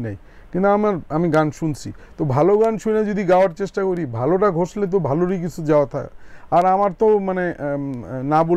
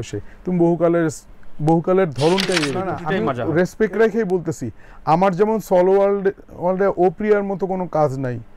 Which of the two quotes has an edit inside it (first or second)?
second